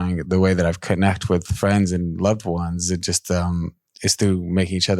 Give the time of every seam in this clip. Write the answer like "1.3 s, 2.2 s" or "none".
3.8 s